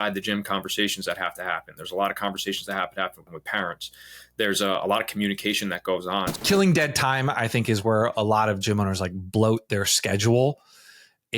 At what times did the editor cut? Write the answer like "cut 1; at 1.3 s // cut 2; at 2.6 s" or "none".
cut 1; at 3.4 s // cut 2; at 6.3 s